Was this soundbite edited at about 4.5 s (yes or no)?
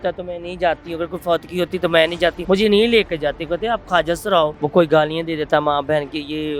yes